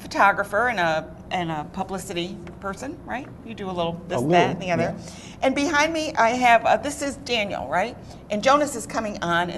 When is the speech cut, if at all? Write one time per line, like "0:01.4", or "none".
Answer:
none